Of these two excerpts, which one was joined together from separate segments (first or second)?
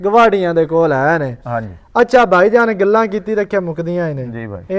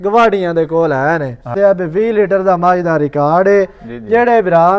second